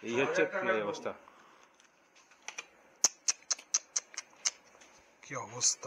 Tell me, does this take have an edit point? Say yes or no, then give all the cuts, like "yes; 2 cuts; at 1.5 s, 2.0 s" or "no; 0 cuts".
no; 0 cuts